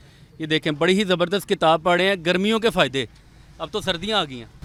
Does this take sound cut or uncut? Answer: uncut